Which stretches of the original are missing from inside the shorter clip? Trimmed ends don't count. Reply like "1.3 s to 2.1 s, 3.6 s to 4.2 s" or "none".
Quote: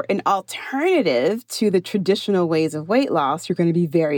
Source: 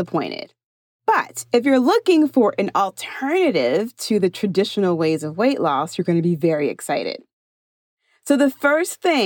none